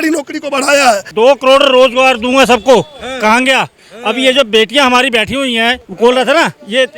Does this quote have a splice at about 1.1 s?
yes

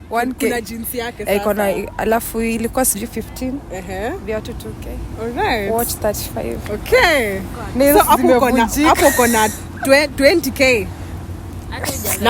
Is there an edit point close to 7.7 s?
no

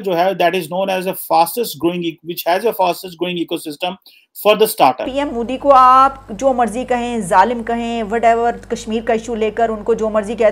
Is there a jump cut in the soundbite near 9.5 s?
no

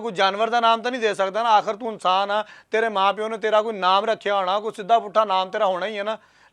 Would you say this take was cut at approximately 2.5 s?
no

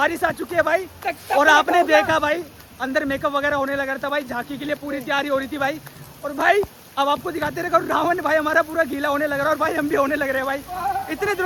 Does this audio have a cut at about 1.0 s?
no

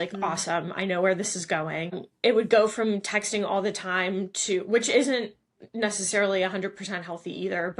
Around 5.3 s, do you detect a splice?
no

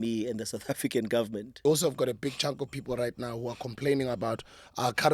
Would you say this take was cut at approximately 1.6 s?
yes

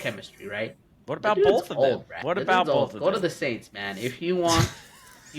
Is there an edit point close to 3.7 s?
no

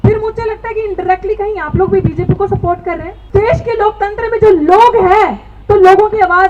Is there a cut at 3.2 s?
yes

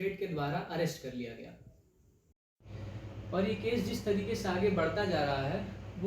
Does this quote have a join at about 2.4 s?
yes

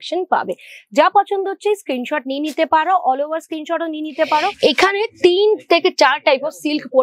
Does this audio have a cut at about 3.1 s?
no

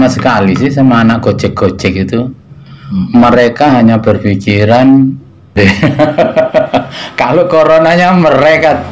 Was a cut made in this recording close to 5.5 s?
yes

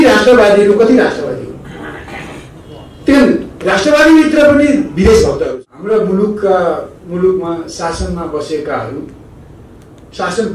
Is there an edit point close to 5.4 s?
yes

